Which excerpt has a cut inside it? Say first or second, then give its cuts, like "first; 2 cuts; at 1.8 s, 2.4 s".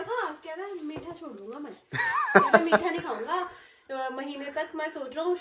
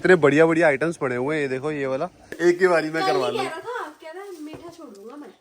second; 1 cut; at 2.3 s